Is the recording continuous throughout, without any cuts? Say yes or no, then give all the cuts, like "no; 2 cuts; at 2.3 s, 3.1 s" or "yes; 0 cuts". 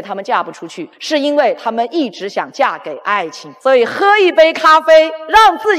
yes; 0 cuts